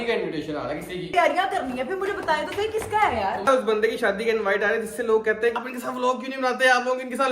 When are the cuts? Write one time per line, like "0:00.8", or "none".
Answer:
0:01.1
0:03.5
0:05.5